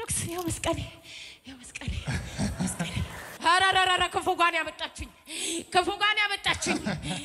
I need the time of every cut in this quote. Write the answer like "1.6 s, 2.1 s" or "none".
3.3 s